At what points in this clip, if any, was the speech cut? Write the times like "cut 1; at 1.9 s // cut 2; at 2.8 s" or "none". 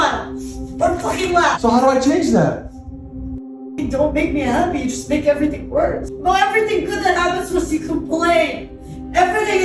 cut 1; at 6.1 s